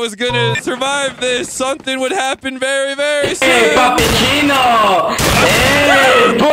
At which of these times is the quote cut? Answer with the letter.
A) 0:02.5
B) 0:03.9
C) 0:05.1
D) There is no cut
D